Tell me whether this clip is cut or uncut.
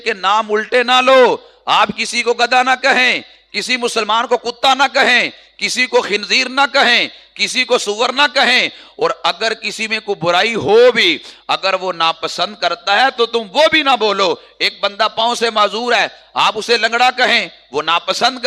uncut